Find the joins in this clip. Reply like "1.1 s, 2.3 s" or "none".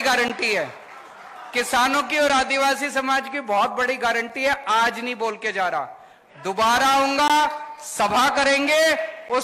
none